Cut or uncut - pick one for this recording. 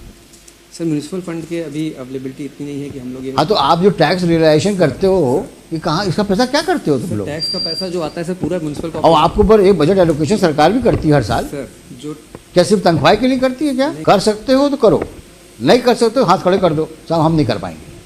cut